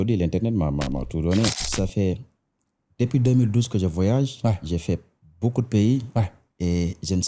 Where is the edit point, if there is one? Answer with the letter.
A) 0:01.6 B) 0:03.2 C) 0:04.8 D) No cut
A